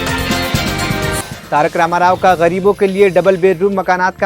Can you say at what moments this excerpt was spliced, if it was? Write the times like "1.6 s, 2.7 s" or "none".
1.4 s